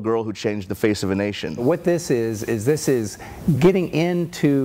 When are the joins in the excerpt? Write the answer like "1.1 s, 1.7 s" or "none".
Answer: 1.6 s